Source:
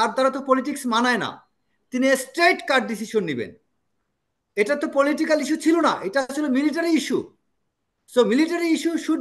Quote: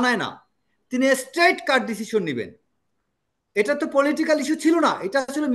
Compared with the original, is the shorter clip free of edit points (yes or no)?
yes